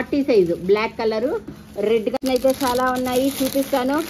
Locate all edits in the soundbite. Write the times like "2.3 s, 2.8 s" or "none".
2.2 s